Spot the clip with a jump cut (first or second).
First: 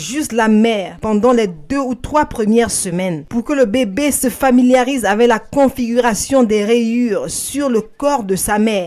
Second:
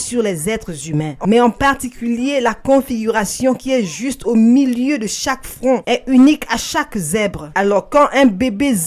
second